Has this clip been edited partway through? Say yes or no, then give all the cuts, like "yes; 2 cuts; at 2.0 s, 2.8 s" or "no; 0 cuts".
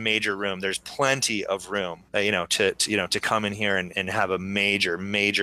yes; 2 cuts; at 2.0 s, 3.9 s